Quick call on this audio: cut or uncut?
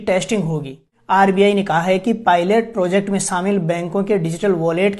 cut